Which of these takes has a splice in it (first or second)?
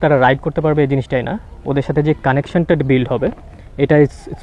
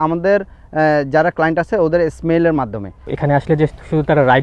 second